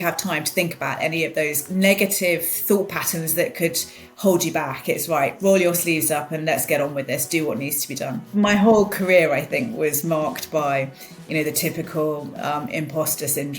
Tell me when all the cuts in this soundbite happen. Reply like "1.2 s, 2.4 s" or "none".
1.6 s, 8.2 s

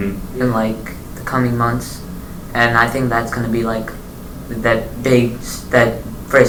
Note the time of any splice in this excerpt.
none

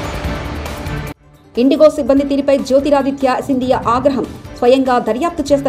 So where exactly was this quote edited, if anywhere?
1.3 s

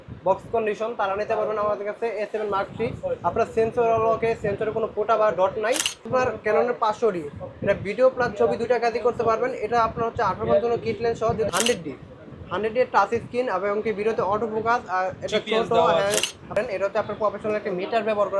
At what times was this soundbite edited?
6.1 s, 11.5 s, 16.5 s

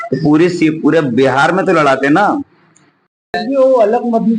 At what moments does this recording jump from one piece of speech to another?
3.3 s

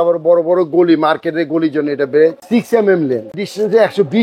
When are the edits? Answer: 2.4 s, 3.4 s

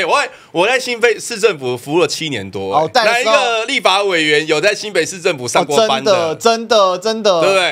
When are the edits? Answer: 2.9 s

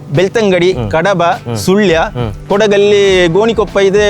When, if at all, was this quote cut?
2.3 s

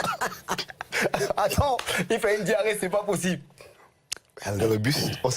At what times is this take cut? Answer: 3.9 s

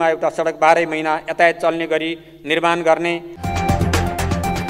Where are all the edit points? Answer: 3.3 s

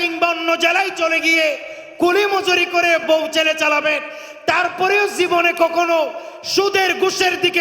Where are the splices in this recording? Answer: 3.0 s

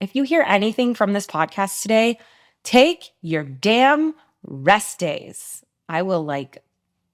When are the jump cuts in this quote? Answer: none

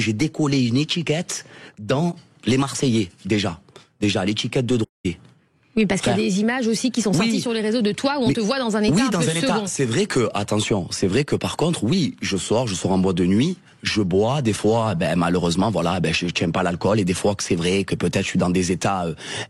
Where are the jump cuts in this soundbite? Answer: none

